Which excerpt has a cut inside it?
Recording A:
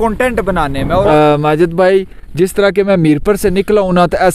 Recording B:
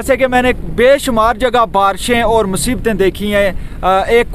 A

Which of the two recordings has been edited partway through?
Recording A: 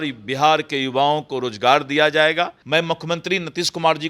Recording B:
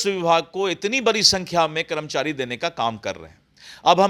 A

